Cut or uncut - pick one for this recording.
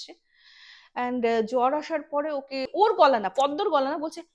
cut